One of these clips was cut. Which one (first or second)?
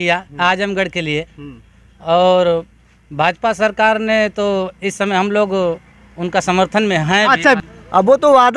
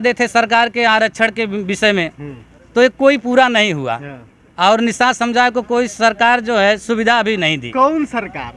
first